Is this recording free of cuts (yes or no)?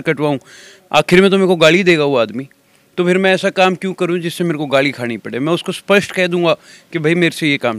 yes